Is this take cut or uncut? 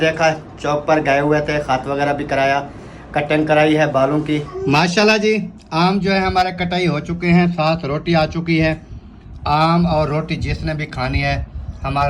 cut